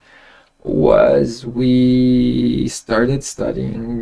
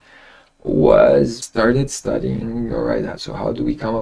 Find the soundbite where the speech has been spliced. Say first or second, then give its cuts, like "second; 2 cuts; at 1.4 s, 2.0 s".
second; 1 cut; at 1.4 s